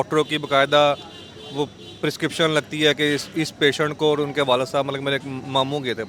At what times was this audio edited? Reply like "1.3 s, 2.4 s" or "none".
none